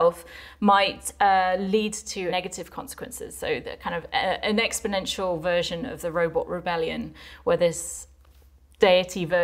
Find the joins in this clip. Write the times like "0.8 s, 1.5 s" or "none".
2.3 s